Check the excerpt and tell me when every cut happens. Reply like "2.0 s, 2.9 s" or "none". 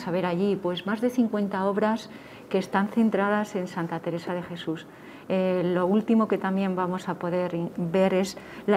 none